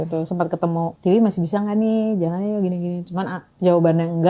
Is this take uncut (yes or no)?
no